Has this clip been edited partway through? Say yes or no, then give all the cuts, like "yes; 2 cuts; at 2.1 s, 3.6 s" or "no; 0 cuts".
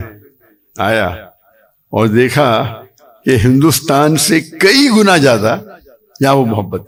no; 0 cuts